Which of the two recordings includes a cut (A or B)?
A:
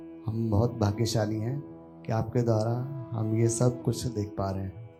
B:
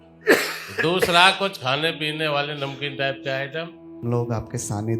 B